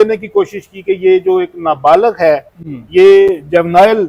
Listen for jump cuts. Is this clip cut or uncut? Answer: uncut